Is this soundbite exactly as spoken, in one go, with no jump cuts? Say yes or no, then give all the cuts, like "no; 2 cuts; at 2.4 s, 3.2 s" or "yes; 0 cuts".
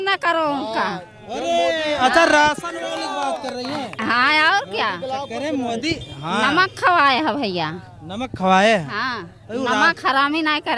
yes; 0 cuts